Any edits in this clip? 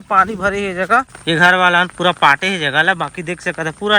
yes; 1 cut; at 1.1 s

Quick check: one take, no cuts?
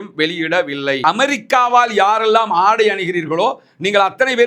no; 1 cut; at 1.0 s

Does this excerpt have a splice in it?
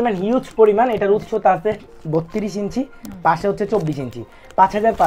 no; 0 cuts

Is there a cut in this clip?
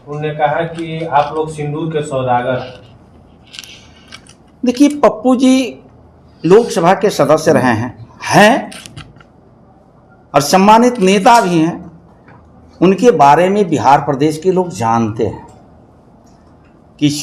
no; 0 cuts

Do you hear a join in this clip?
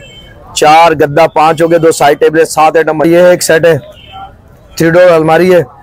yes; 1 cut; at 3.1 s

